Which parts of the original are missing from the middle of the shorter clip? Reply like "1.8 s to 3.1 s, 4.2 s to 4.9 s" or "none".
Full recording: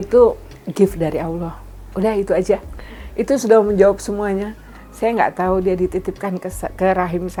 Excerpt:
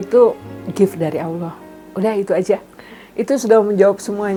none